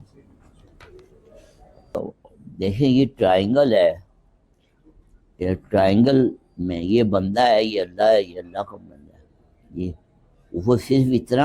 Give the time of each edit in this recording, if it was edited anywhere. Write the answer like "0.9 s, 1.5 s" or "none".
2.0 s